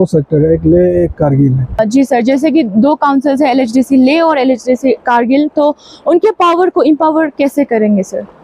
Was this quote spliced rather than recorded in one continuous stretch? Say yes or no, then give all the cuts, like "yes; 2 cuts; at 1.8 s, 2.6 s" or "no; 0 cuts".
yes; 1 cut; at 1.8 s